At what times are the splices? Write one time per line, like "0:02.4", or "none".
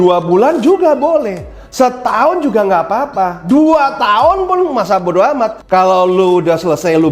0:05.6

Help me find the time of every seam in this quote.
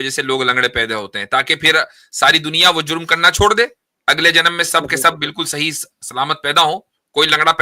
none

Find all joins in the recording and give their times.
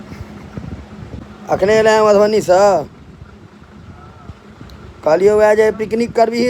0:01.2

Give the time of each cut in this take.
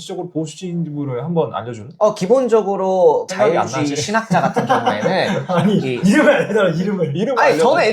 0:01.8

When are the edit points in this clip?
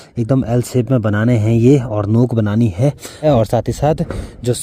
0:03.2

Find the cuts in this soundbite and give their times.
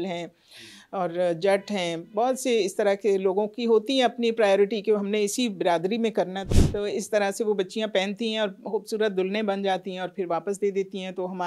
0:06.4

